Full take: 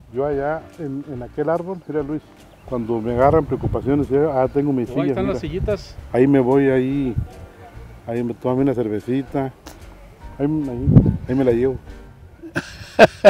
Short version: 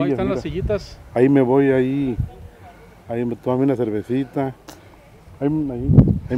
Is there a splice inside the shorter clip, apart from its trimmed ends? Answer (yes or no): no